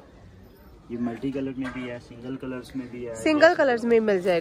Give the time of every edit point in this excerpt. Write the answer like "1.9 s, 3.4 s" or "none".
none